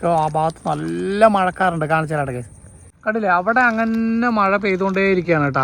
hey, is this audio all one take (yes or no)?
yes